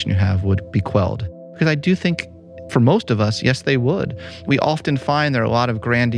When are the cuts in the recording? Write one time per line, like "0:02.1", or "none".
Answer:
0:01.5
0:02.6
0:04.4